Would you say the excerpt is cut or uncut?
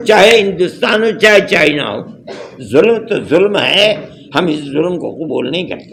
uncut